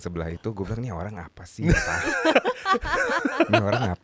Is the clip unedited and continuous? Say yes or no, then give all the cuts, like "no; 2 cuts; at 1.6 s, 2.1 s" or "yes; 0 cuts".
yes; 0 cuts